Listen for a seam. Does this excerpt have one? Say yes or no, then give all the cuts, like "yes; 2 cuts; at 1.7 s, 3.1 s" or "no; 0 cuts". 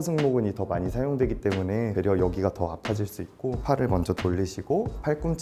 no; 0 cuts